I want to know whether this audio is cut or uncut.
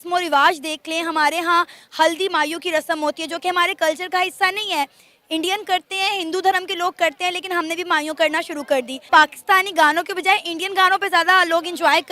cut